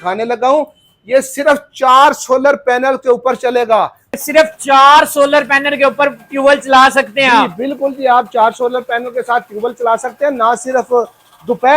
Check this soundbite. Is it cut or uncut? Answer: cut